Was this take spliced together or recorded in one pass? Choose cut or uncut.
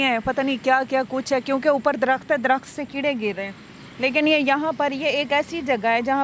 uncut